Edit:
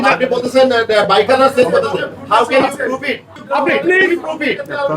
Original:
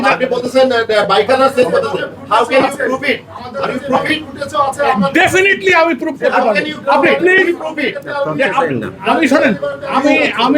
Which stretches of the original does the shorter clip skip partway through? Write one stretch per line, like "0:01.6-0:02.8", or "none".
0:03.4-0:06.7